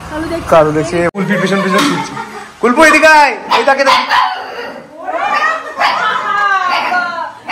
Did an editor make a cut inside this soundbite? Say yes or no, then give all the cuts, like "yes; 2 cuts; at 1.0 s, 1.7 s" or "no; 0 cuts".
yes; 1 cut; at 1.1 s